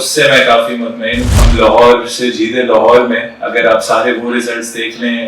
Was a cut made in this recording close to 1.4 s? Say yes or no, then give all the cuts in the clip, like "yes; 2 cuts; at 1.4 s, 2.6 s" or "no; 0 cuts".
yes; 1 cut; at 1.4 s